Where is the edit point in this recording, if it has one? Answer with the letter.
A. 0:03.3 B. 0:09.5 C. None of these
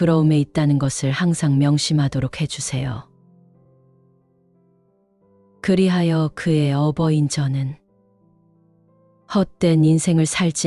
C